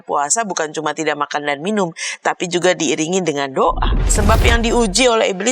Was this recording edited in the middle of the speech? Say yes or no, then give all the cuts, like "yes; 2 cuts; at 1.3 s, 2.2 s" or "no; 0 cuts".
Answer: yes; 1 cut; at 4.0 s